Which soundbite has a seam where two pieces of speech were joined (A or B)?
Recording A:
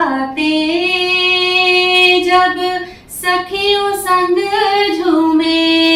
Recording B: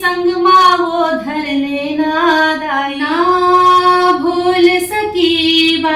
B